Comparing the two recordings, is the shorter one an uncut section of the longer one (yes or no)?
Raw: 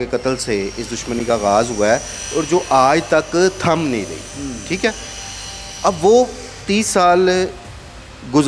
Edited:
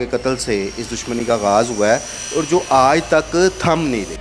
yes